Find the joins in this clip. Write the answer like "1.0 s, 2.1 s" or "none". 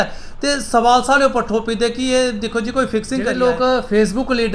3.3 s